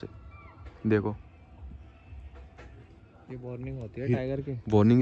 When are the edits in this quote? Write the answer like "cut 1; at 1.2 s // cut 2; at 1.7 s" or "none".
none

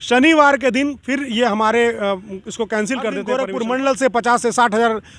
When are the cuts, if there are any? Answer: cut 1; at 3.4 s

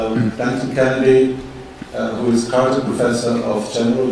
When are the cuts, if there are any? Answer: none

